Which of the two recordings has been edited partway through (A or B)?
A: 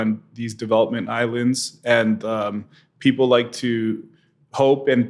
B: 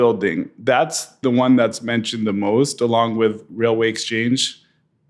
B